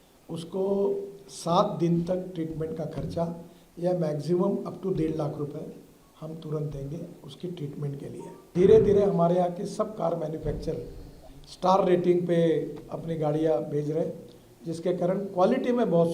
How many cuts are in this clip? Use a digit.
1